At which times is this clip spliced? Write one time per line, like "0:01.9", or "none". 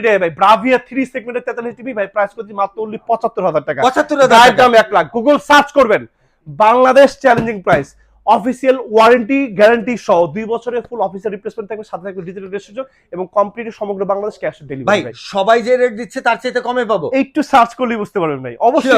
none